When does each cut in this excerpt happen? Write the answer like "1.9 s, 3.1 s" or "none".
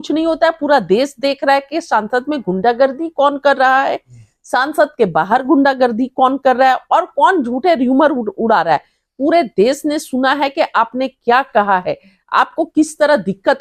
none